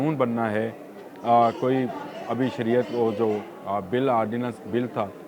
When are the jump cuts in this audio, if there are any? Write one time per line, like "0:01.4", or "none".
none